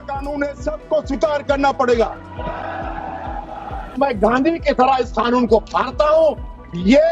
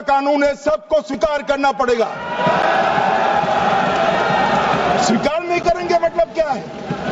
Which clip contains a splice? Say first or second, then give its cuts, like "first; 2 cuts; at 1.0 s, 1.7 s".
first; 1 cut; at 4.0 s